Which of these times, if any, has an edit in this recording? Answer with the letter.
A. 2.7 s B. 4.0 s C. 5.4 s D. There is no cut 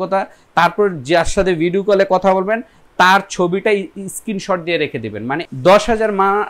C